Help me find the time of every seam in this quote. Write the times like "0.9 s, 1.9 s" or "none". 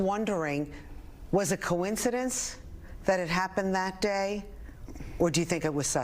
2.4 s